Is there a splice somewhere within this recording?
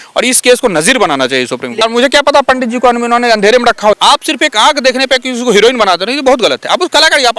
yes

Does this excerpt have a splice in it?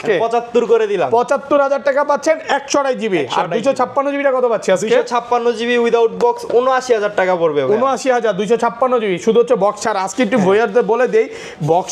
no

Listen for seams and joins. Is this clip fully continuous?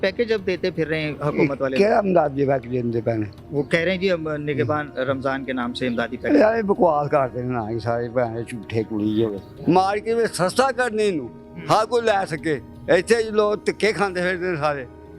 yes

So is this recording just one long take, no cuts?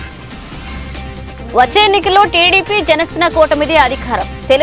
yes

